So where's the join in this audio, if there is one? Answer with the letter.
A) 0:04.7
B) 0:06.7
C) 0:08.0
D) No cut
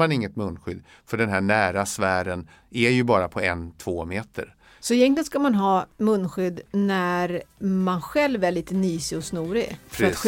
A